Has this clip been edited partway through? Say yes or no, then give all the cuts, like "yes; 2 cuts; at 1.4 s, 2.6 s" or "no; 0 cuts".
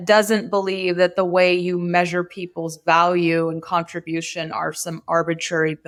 no; 0 cuts